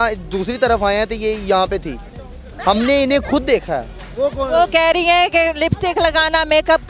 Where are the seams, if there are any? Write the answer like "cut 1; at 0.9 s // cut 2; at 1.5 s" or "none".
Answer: none